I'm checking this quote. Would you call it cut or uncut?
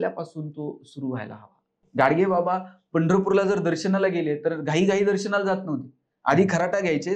cut